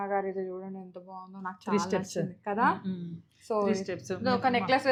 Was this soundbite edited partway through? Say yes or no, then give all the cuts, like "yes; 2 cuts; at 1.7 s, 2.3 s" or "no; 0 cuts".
no; 0 cuts